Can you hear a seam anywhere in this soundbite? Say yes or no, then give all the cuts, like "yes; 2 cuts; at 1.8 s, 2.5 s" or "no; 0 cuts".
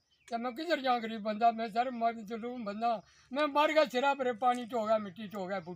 no; 0 cuts